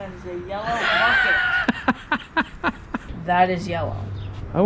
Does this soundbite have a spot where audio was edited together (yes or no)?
yes